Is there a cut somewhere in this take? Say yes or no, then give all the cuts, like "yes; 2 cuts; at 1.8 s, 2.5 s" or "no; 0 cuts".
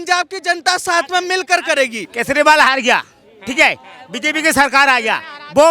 yes; 1 cut; at 2.1 s